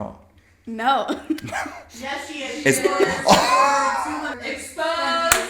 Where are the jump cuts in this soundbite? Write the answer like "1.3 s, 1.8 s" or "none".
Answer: 4.4 s